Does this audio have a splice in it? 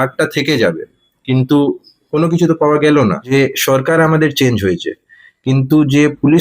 yes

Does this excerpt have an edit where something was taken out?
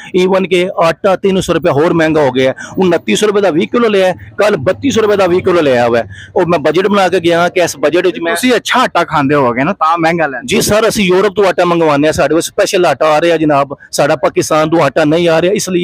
no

